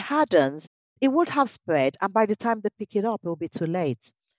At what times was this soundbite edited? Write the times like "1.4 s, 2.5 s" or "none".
0.9 s